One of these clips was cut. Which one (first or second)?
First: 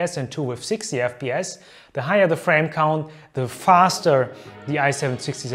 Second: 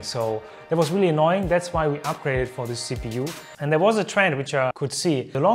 second